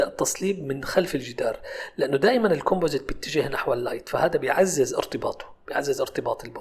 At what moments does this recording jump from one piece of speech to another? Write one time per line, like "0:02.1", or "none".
none